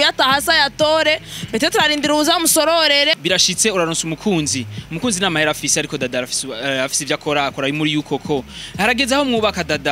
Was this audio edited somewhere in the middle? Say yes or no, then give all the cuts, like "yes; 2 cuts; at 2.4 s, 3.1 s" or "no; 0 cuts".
yes; 1 cut; at 3.2 s